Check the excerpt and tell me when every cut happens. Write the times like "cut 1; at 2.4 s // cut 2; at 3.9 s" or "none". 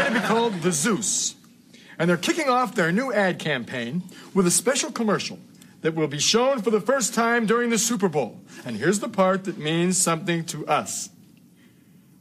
none